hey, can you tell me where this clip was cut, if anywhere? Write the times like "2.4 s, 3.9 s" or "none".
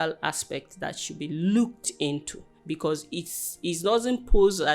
none